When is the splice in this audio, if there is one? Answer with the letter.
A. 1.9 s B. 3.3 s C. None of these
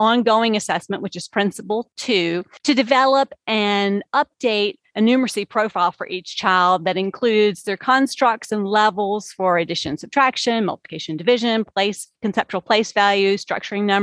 A